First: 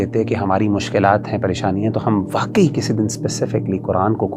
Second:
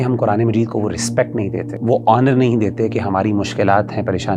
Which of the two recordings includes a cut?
second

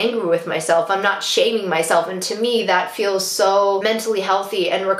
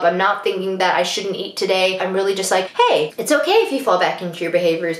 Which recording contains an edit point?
second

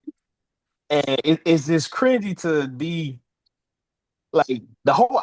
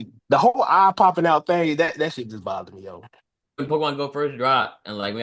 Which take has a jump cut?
second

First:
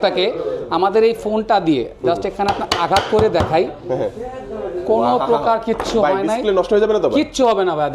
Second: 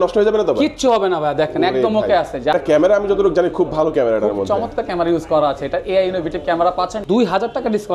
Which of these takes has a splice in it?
second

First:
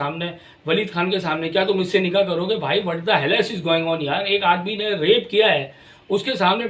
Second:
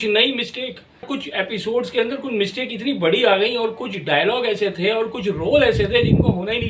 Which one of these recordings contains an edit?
second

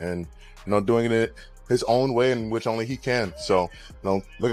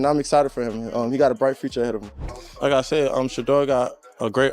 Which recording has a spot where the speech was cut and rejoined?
second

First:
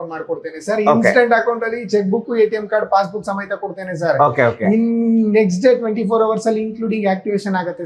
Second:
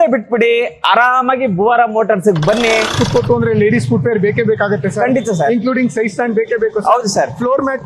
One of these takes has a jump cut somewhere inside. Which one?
second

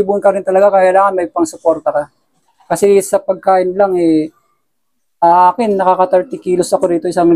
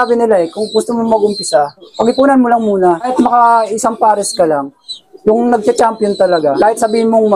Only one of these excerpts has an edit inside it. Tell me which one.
second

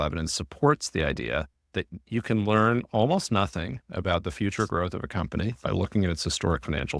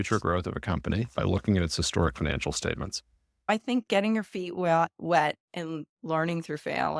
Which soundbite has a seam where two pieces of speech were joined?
second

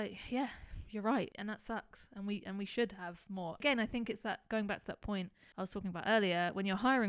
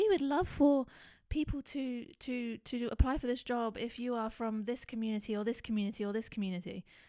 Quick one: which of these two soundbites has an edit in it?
first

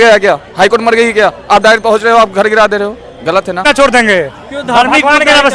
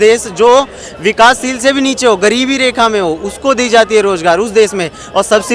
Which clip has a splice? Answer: first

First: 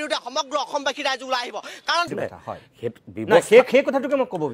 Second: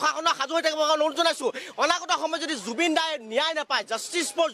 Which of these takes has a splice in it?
first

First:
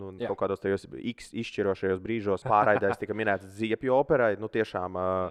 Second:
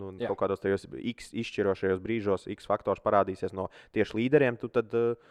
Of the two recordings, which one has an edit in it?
first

